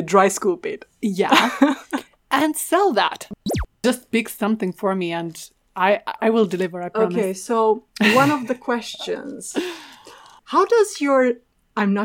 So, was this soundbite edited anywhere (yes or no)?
yes